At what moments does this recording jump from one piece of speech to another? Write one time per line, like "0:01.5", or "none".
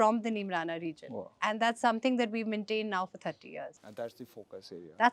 0:03.8

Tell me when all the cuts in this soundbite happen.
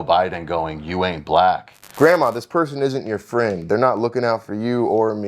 0:01.8

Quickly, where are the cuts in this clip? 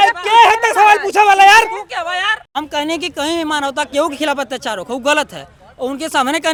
none

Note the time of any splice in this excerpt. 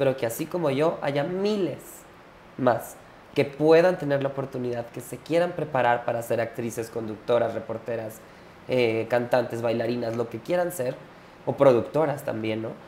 none

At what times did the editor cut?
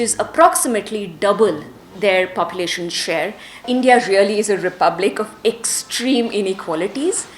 0:03.6

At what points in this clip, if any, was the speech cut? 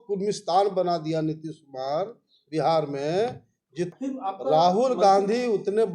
0:03.9

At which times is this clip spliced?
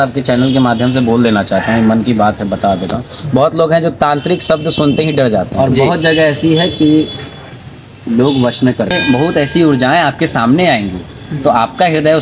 0:05.5
0:09.0

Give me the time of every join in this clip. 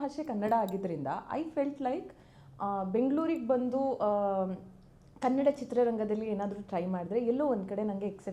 none

